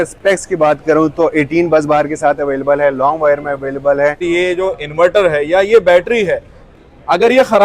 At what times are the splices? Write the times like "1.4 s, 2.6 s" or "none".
4.2 s